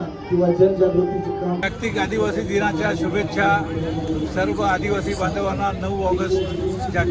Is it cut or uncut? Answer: cut